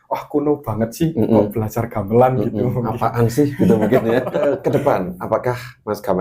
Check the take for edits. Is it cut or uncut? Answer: cut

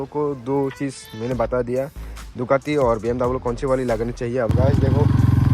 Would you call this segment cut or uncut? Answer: cut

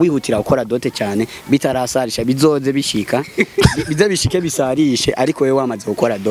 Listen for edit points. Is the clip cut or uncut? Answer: uncut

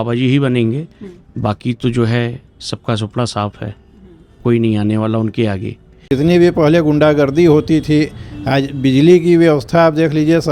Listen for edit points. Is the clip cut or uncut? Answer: cut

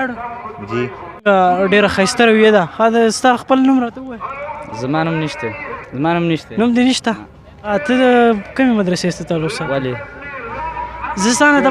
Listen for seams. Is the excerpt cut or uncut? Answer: cut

